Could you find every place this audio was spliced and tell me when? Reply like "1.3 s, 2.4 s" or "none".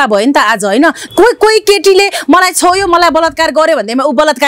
1.0 s